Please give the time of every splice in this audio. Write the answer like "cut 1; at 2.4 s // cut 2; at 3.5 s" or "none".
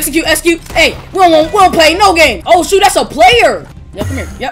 cut 1; at 2.4 s